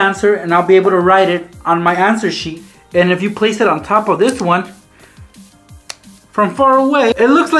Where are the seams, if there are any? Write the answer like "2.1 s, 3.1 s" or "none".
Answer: 2.6 s